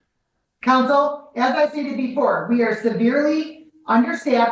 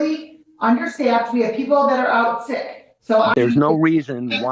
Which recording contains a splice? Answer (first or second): second